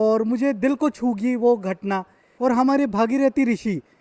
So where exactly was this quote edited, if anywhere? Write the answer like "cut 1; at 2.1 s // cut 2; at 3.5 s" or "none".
cut 1; at 2.2 s